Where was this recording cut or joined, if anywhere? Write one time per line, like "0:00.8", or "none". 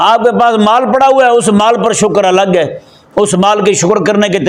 none